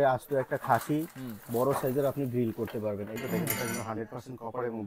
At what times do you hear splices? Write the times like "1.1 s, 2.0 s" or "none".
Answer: 3.1 s